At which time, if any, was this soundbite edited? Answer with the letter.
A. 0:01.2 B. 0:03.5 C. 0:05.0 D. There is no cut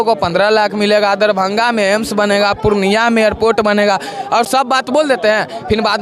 D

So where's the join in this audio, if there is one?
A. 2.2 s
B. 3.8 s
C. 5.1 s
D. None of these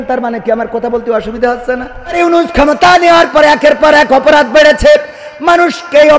A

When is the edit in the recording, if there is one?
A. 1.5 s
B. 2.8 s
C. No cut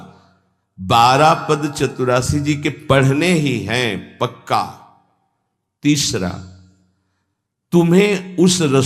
C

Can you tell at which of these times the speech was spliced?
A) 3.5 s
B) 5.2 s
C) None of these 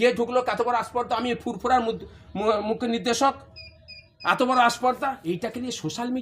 B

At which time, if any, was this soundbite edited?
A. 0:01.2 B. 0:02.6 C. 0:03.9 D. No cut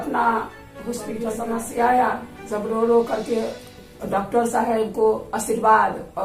A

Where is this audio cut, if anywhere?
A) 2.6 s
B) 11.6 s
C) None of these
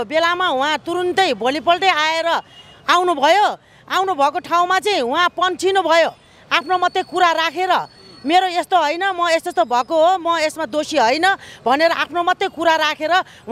C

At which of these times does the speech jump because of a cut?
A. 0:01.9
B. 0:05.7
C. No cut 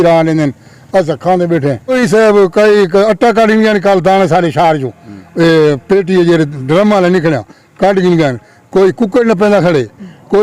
A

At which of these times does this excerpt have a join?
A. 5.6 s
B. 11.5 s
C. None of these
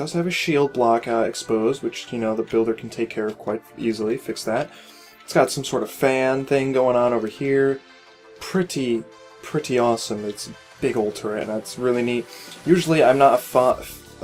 C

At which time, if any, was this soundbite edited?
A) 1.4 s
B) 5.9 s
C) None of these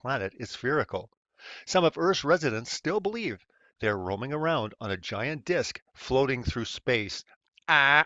C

